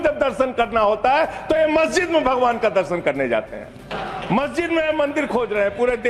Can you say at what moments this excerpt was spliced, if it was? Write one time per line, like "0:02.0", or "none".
0:03.9